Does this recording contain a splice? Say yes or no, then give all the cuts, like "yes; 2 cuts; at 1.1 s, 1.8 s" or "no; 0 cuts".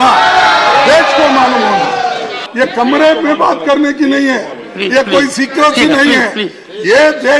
yes; 1 cut; at 2.4 s